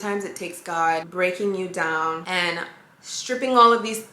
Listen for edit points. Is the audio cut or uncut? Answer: cut